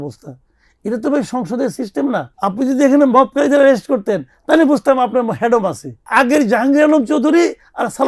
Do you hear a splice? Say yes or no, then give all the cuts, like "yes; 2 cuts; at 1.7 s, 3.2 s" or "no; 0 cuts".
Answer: yes; 2 cuts; at 2.3 s, 6.1 s